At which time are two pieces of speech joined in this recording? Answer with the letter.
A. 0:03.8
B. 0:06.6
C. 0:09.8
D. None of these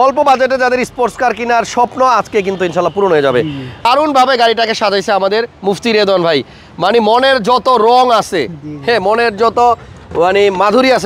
A